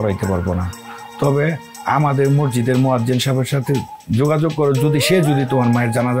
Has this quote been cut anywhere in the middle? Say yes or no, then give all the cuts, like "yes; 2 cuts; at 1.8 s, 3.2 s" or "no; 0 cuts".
no; 0 cuts